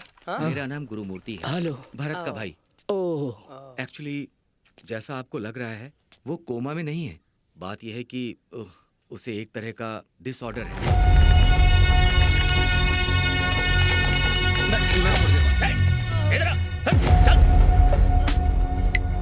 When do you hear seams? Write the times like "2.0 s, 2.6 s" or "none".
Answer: 10.7 s, 15.3 s